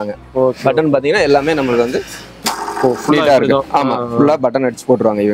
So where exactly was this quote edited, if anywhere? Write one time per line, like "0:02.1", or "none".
none